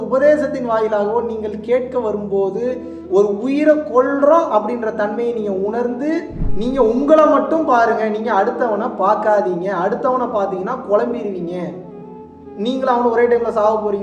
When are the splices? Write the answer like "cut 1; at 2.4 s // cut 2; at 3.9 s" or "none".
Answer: cut 1; at 6.4 s